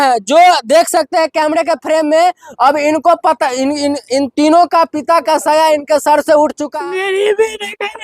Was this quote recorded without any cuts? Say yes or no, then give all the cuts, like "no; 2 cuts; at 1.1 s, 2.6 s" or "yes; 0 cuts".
no; 1 cut; at 6.6 s